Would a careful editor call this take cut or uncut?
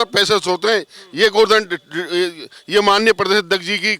uncut